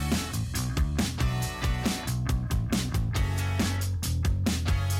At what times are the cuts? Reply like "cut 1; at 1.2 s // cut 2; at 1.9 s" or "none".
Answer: cut 1; at 2.4 s